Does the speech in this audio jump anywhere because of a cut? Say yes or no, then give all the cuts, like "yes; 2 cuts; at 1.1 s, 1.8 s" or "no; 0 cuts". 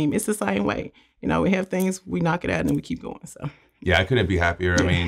no; 0 cuts